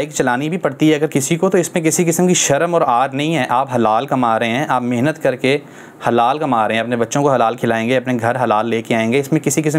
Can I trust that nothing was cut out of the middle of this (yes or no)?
yes